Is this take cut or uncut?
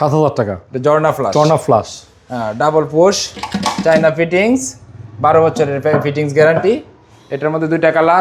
uncut